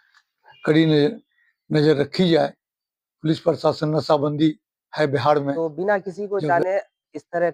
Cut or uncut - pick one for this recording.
cut